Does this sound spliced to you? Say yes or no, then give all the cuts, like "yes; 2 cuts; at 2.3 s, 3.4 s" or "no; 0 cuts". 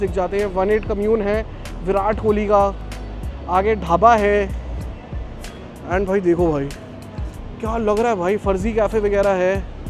no; 0 cuts